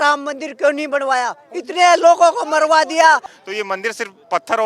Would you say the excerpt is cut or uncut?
cut